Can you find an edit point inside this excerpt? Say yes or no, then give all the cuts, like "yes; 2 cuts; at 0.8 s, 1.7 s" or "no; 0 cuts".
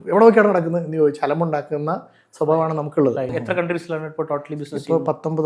yes; 1 cut; at 3.3 s